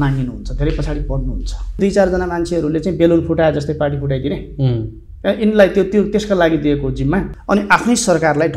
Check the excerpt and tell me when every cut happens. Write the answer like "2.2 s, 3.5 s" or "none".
1.8 s, 7.3 s